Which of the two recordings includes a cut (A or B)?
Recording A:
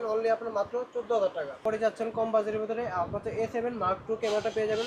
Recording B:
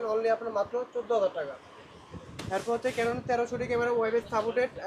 A